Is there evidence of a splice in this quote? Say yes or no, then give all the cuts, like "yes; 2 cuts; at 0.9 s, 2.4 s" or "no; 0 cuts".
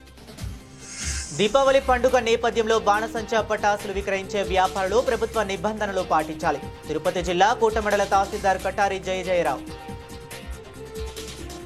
yes; 2 cuts; at 1.1 s, 9.6 s